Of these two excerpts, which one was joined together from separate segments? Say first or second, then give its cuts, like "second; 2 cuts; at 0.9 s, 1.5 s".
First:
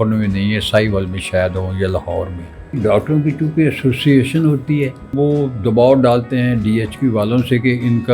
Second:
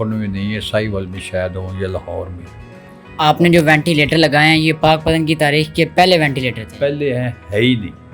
first; 2 cuts; at 2.8 s, 5.1 s